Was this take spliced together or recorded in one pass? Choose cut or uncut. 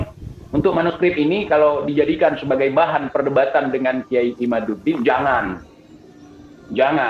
uncut